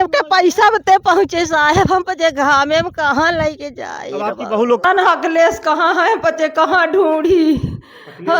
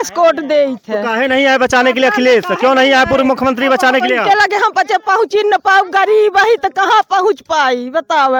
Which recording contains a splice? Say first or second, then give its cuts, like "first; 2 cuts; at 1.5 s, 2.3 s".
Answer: first; 1 cut; at 4.8 s